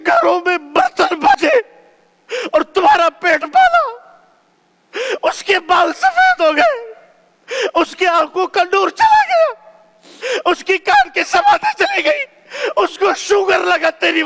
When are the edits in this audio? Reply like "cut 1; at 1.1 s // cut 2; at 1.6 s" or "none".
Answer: cut 1; at 1.3 s